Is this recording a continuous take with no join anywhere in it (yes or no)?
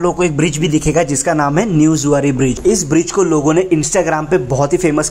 no